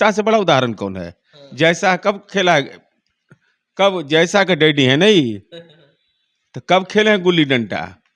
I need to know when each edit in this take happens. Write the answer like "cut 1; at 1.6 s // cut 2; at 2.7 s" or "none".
none